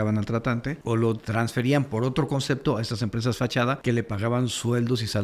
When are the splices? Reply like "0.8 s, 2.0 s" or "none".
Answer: 1.0 s, 3.8 s